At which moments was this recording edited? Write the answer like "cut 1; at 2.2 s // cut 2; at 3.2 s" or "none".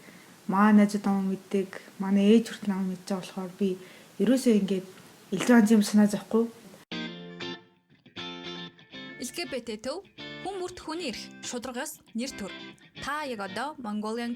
cut 1; at 6.9 s